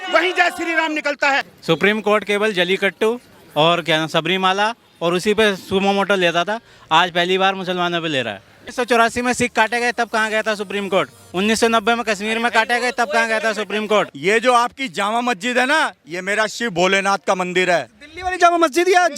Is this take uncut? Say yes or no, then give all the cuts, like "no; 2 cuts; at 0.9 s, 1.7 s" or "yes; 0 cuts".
no; 3 cuts; at 1.5 s, 8.6 s, 14.1 s